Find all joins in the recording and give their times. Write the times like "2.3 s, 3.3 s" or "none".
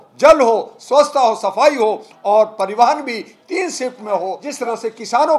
4.4 s